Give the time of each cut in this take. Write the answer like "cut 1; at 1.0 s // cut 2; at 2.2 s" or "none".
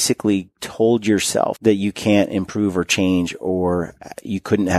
cut 1; at 1.6 s